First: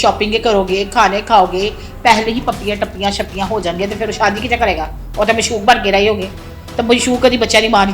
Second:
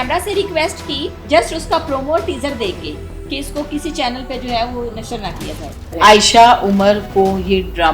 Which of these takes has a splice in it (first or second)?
second